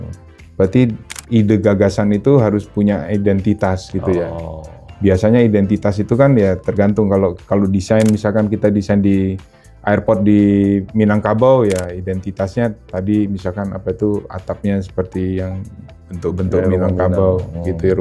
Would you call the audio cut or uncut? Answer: cut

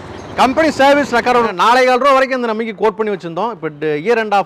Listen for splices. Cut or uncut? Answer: cut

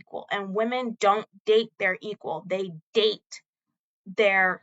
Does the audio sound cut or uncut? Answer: uncut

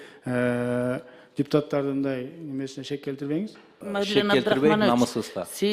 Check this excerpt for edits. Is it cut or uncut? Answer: cut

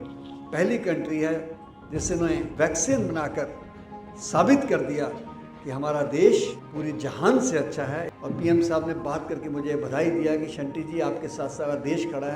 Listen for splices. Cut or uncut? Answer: cut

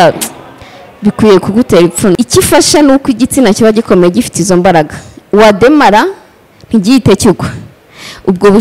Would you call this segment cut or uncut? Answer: cut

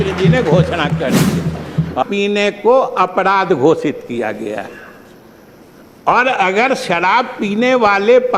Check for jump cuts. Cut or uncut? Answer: cut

